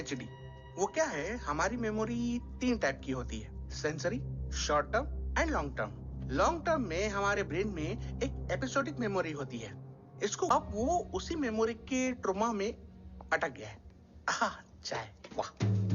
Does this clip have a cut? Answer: yes; 1 cut; at 10.5 s

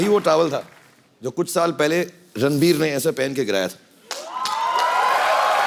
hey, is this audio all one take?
yes; 0 cuts

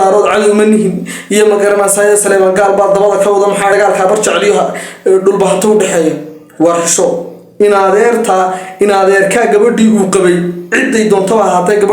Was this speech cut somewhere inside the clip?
yes; 1 cut; at 3.7 s

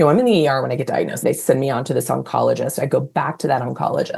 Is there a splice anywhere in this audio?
yes; 1 cut; at 1.2 s

